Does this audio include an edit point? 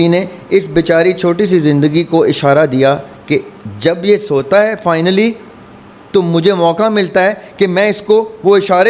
no; 0 cuts

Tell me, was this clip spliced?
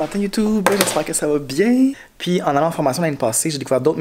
yes; 1 cut; at 2.1 s

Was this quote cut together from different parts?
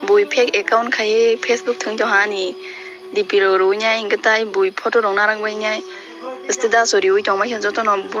no; 0 cuts

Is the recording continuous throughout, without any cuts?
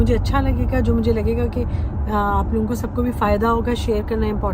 yes; 0 cuts

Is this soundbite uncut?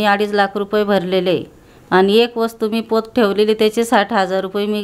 yes; 0 cuts

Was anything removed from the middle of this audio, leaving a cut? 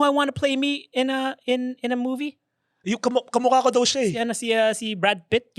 no; 0 cuts

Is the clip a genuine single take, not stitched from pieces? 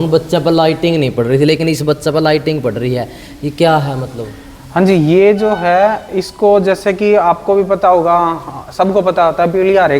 yes; 0 cuts

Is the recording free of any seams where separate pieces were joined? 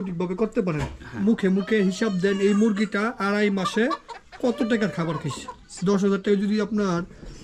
no; 2 cuts; at 1.2 s, 5.7 s

